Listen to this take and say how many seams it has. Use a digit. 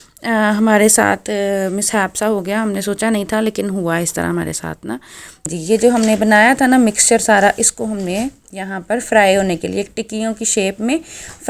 1